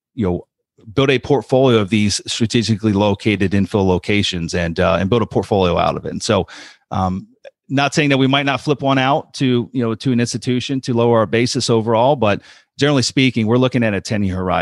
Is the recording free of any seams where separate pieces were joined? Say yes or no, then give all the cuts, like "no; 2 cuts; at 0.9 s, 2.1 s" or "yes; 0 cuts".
yes; 0 cuts